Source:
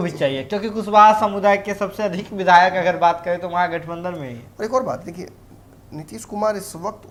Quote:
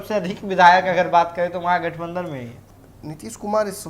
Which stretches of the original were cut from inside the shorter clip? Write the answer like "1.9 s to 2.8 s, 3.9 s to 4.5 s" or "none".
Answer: 4.4 s to 5.4 s